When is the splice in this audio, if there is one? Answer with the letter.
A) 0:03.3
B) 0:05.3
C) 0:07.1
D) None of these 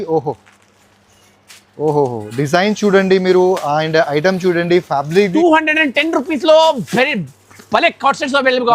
B